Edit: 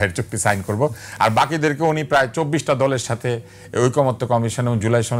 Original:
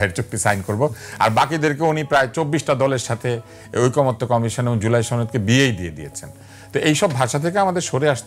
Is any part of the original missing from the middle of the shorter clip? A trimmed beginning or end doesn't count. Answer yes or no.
no